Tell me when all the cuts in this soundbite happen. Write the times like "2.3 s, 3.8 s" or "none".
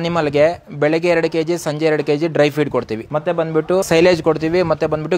3.0 s, 3.9 s